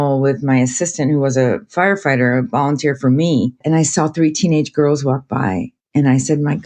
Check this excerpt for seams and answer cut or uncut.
cut